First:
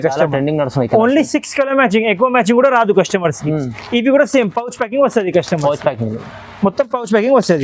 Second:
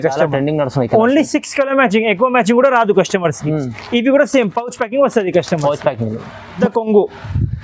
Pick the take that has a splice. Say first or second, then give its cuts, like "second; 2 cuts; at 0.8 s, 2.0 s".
second; 1 cut; at 6.6 s